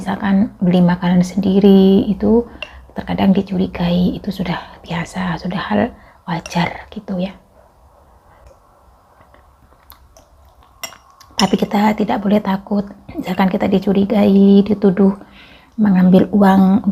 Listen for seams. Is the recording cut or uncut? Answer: uncut